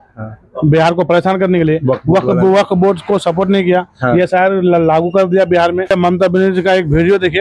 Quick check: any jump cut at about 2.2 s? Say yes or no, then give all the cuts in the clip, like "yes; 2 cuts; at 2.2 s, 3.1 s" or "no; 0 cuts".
no; 1 cut; at 5.9 s